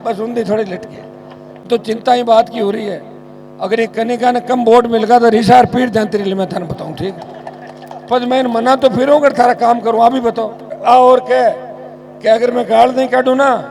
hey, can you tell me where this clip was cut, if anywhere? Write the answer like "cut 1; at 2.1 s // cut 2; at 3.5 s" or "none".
cut 1; at 1.6 s // cut 2; at 10.8 s